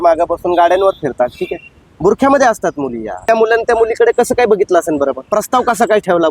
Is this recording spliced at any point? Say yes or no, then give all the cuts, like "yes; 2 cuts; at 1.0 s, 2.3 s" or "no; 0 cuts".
yes; 2 cuts; at 3.2 s, 5.3 s